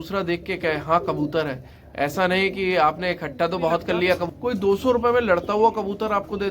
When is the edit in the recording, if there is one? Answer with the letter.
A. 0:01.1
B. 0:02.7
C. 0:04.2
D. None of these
C